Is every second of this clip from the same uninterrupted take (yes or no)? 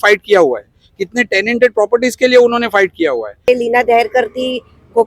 no